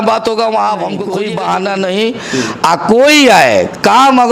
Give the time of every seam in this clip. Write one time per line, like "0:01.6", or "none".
0:01.0